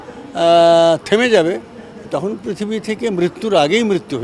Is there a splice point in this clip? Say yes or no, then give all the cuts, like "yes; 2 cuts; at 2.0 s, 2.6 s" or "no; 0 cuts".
no; 0 cuts